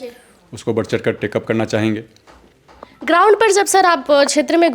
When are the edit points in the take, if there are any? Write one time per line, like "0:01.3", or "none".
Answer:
none